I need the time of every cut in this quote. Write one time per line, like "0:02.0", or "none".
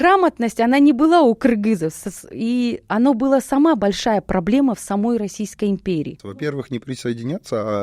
0:06.5